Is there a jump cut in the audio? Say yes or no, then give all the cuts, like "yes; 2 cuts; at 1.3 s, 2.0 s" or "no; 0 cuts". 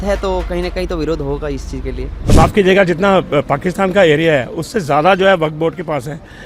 yes; 1 cut; at 2.2 s